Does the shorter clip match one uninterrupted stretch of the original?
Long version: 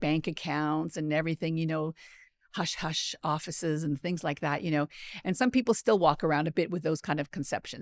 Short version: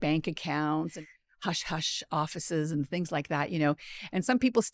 no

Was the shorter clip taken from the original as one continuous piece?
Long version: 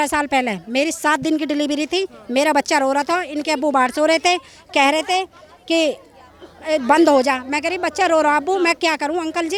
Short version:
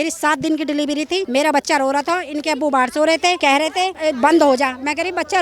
no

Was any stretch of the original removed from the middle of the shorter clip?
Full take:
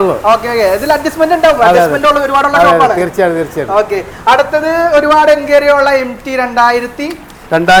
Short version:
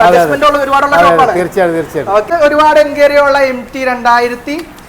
yes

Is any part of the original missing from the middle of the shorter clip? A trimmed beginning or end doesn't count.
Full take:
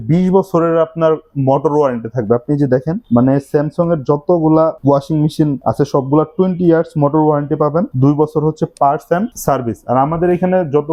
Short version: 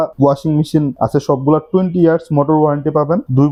no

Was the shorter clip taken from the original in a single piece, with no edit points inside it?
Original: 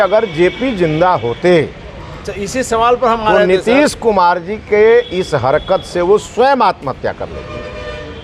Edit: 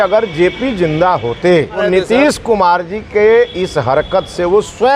no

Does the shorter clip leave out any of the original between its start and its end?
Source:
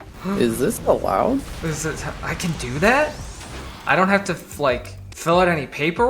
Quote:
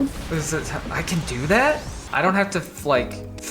yes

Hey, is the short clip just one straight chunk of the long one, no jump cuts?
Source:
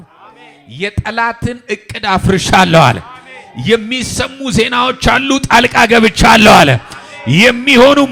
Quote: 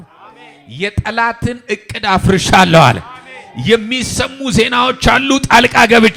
yes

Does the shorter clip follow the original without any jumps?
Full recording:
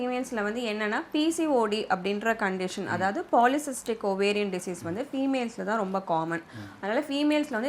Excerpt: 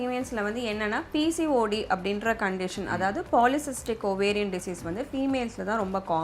yes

